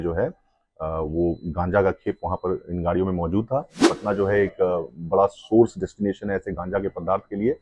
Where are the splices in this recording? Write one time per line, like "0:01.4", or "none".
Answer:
0:03.9